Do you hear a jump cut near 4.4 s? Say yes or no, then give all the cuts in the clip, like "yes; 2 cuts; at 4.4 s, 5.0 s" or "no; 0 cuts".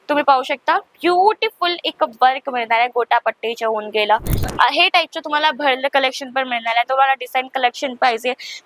yes; 1 cut; at 4.4 s